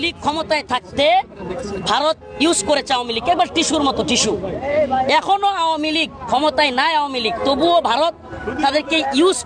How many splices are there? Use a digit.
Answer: 0